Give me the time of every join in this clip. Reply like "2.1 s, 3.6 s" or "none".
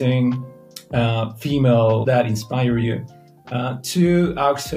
2.0 s